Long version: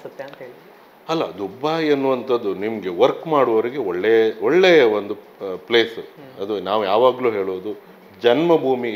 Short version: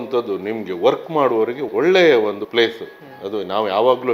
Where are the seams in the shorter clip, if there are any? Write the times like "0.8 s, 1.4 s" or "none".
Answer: 1.7 s, 2.4 s